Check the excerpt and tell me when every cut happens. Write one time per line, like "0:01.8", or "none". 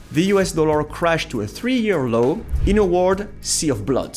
0:02.5